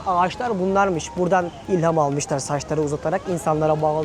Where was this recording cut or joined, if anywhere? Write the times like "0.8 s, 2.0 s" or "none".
none